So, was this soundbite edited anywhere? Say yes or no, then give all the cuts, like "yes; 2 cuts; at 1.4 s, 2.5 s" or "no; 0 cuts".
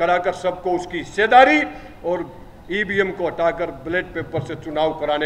no; 0 cuts